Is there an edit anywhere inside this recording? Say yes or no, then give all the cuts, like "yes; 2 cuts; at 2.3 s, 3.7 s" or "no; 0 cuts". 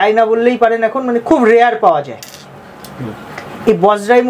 no; 0 cuts